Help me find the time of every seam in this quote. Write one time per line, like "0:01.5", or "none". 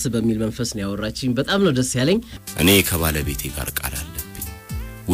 0:02.4